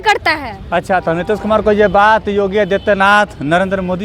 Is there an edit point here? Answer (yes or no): no